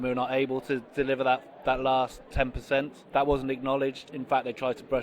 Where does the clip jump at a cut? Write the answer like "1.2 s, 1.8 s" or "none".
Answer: 2.5 s, 4.1 s